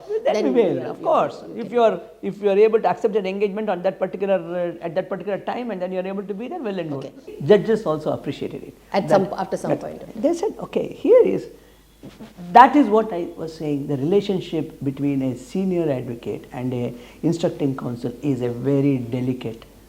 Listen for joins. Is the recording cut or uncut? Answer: cut